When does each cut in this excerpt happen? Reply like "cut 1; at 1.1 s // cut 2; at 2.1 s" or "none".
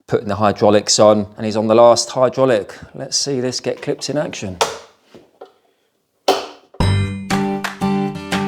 cut 1; at 6.6 s